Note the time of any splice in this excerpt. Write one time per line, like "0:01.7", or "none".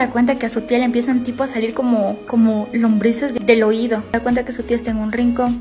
0:03.4
0:04.1